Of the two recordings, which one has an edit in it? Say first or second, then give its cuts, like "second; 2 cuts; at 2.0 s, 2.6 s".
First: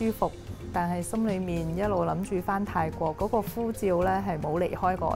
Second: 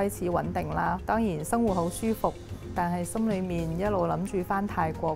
second; 1 cut; at 1.0 s